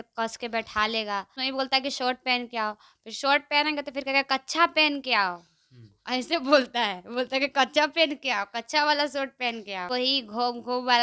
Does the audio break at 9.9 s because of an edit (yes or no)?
yes